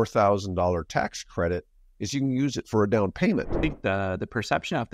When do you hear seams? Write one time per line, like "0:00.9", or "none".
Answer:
0:03.5